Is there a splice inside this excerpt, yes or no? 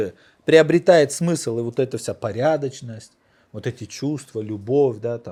no